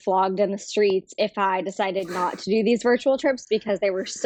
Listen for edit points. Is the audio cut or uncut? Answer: uncut